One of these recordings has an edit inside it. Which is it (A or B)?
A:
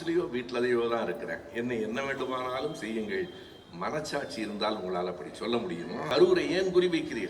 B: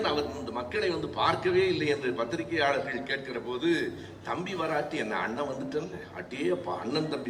A